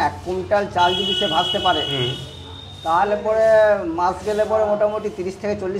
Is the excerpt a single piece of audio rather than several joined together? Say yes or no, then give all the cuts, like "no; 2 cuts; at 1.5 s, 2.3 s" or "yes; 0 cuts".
yes; 0 cuts